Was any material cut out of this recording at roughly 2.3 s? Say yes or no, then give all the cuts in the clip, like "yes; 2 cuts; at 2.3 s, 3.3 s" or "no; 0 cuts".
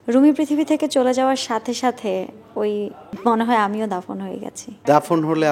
no; 0 cuts